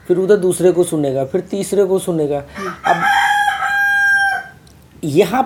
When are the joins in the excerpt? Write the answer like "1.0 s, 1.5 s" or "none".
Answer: none